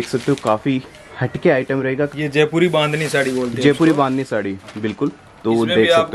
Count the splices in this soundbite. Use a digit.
1